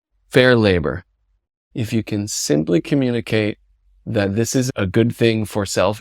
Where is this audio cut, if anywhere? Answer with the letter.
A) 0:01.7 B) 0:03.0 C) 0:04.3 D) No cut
A